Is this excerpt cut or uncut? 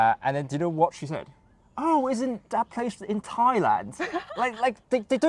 uncut